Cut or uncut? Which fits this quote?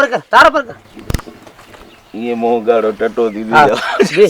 uncut